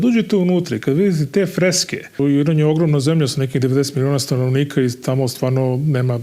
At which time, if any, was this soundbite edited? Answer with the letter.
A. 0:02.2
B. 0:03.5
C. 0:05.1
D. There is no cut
A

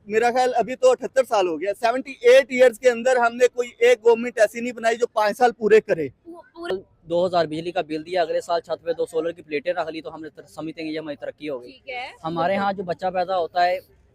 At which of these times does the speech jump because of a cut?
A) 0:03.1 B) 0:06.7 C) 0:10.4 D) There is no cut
B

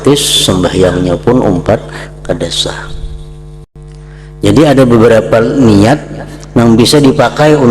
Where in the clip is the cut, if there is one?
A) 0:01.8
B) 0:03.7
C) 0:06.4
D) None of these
B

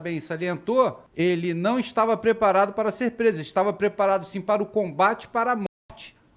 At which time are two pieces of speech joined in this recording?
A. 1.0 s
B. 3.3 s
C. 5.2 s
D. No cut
A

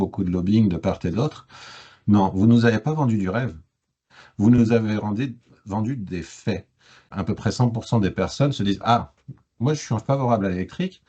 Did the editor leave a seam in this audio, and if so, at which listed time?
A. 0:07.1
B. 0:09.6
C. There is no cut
A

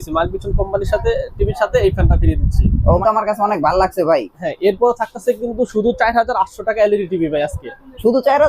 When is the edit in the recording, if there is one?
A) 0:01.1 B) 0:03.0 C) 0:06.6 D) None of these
B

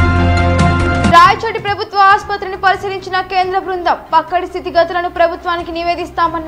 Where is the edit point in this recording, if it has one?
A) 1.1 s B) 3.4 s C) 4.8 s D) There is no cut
A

